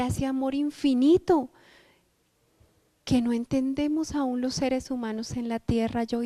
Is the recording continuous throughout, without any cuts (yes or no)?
yes